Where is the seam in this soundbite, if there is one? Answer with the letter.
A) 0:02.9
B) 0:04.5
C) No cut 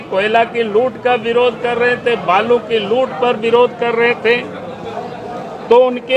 C